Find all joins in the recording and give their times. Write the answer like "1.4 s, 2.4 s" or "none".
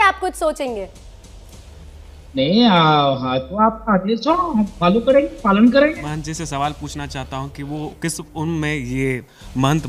none